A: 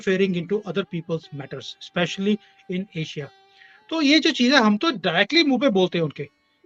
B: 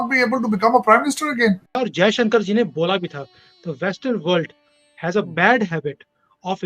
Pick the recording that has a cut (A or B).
B